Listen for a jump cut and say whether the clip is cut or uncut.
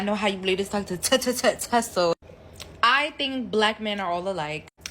cut